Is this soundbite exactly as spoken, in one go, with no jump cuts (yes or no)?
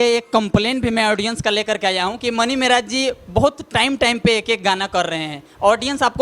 yes